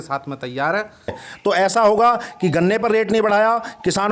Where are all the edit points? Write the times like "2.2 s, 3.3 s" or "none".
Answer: 1.2 s